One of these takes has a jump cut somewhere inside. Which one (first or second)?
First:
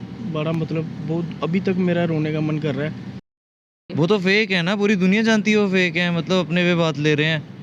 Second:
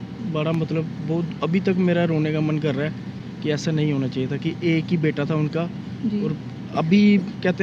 first